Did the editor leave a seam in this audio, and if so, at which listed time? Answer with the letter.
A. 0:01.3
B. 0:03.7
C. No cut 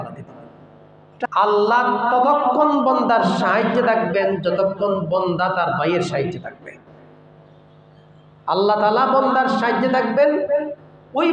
A